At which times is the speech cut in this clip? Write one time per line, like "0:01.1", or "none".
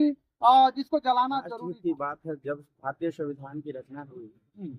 0:01.5